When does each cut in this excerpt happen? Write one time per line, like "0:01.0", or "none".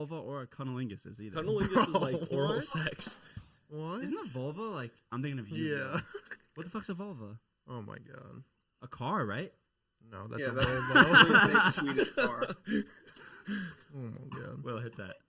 0:05.1

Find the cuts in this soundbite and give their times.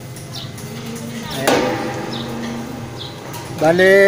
none

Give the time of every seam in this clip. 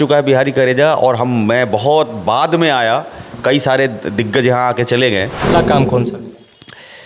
0:05.4

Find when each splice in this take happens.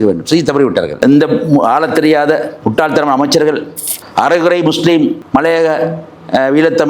0:00.9

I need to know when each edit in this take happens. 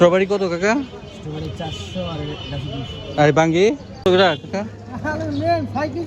0:04.1

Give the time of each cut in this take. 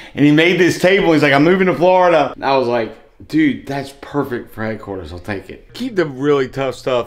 0:02.4
0:05.7

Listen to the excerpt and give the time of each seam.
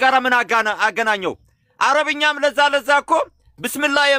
none

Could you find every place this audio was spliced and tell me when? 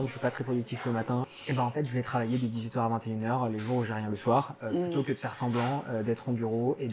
0:01.1

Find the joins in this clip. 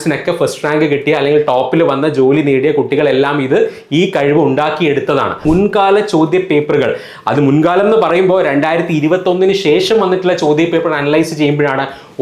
0:05.4

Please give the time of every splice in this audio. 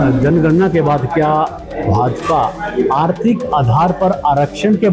none

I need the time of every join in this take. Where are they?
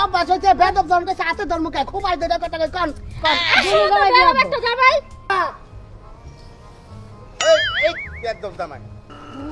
0:05.3

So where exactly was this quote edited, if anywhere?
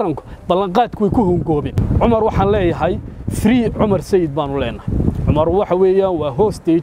0:01.8

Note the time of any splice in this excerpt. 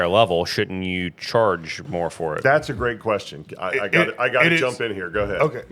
none

